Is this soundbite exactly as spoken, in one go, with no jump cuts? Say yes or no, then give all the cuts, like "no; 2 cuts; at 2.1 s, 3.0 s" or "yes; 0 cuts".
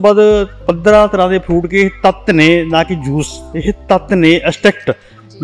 yes; 0 cuts